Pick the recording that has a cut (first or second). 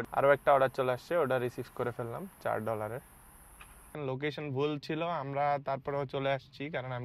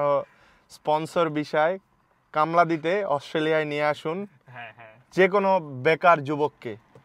first